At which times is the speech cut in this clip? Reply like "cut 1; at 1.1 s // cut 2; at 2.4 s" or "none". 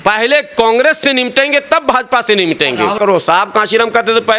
cut 1; at 3.0 s